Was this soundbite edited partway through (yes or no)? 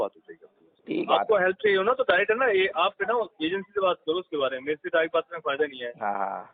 yes